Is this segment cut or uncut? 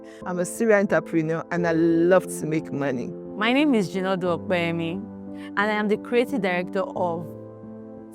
cut